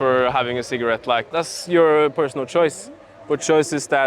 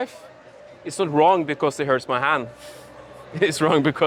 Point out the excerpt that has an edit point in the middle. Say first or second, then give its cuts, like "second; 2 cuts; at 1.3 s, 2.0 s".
first; 1 cut; at 1.3 s